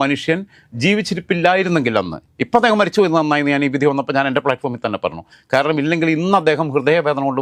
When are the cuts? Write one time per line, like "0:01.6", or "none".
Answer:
none